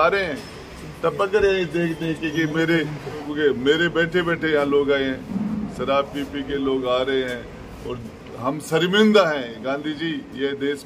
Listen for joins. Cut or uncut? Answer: cut